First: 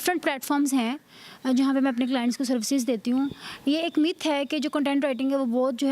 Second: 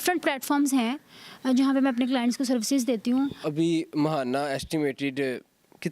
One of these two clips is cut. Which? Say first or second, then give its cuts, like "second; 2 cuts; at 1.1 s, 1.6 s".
second; 1 cut; at 3.4 s